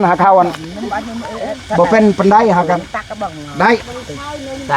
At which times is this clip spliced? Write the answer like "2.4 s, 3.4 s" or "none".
none